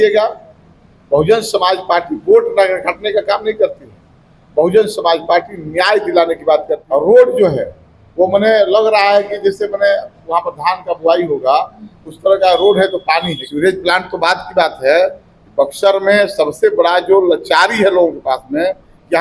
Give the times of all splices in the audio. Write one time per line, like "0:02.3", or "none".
0:06.8
0:13.4